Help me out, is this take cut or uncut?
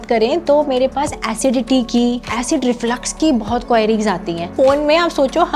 cut